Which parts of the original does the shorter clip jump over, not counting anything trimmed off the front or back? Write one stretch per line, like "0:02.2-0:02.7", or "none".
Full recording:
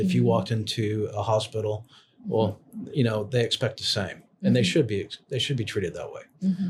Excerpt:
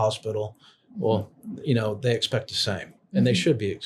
none